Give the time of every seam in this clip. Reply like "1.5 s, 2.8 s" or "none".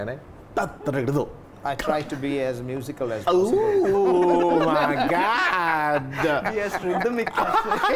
none